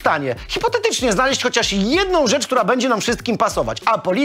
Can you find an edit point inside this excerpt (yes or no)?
no